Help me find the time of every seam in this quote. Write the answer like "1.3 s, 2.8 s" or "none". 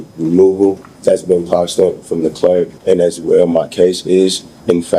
0.9 s, 2.7 s